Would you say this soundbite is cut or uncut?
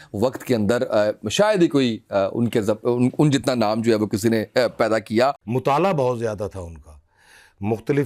cut